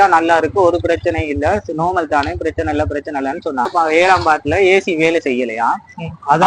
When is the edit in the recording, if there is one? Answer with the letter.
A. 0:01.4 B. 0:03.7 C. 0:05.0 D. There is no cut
B